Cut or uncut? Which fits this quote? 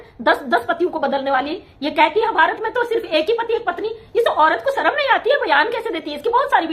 uncut